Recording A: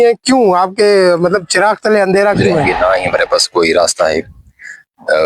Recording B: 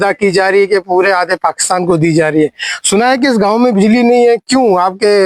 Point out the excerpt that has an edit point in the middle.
A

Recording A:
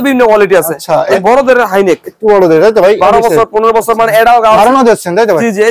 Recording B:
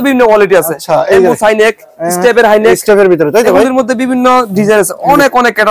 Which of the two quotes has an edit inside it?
A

